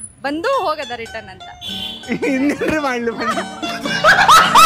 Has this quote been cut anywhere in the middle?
no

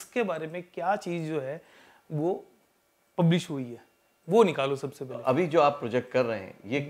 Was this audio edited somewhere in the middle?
yes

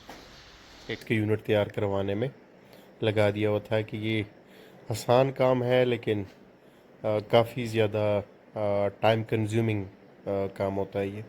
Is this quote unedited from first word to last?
no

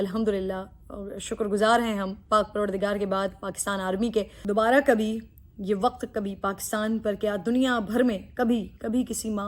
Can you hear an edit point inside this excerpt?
yes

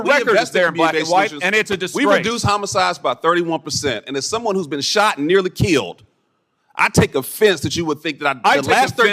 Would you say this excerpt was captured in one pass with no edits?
yes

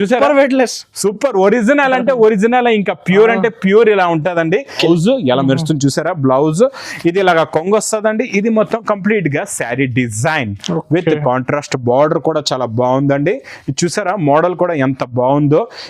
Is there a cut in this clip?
yes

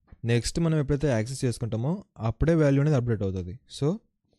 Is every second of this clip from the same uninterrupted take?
yes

